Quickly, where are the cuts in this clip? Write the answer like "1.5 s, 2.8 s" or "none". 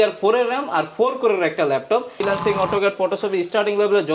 2.2 s